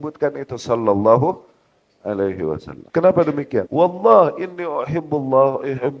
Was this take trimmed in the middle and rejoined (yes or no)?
yes